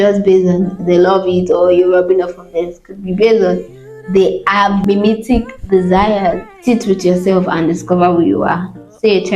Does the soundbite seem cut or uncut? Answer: cut